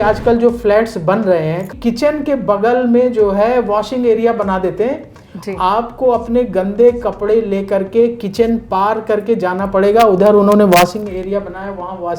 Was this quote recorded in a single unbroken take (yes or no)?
no